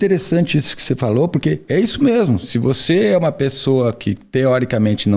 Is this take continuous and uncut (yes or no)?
yes